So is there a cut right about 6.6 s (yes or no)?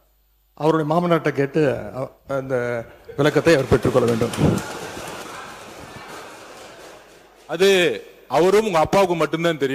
no